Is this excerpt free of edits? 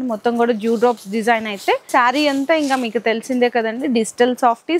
no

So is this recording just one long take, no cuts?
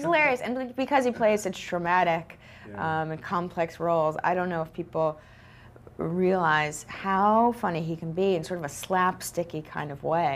yes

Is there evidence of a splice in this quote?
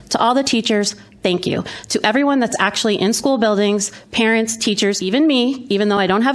yes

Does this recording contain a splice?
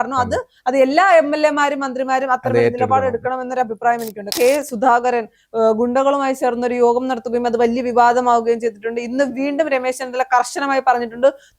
yes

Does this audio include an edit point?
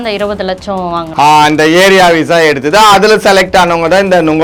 no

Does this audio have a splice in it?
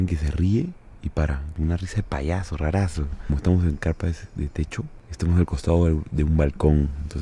yes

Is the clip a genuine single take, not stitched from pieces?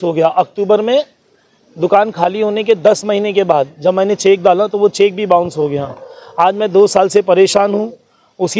yes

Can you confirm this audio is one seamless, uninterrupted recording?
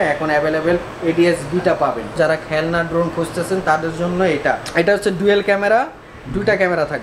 no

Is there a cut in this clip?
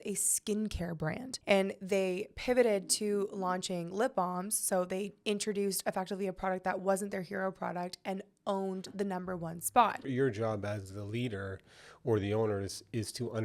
yes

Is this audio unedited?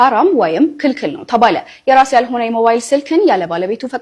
yes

